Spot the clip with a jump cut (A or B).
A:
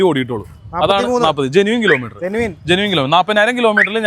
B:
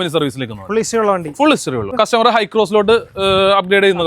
B